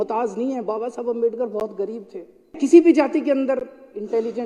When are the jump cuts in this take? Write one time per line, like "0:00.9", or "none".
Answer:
0:02.5